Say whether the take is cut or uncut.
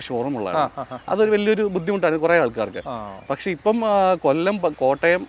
uncut